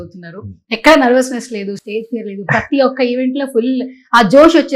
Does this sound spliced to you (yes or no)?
no